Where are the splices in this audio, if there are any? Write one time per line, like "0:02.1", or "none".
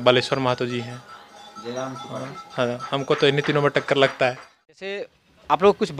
0:05.0